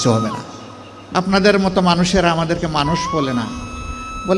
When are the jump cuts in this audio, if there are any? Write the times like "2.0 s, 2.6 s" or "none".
0.9 s